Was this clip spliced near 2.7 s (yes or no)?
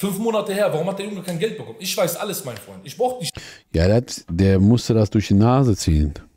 no